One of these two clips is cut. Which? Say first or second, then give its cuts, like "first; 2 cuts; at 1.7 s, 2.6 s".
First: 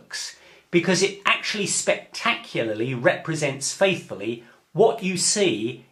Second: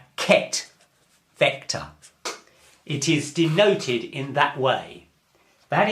second; 1 cut; at 2.0 s